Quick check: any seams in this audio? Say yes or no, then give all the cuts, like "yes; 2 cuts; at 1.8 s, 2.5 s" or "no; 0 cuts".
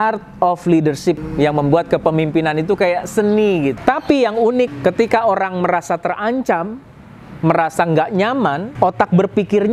yes; 4 cuts; at 1.3 s, 3.8 s, 4.7 s, 8.6 s